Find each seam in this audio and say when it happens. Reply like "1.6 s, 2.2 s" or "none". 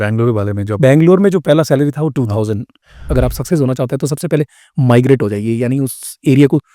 3.0 s